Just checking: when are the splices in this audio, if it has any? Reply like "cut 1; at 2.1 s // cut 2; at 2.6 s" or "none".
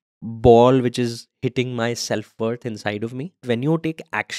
cut 1; at 3.4 s